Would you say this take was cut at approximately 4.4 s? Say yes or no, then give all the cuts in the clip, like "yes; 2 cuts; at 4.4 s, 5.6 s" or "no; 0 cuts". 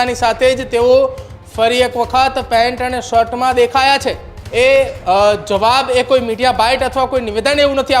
yes; 1 cut; at 4.4 s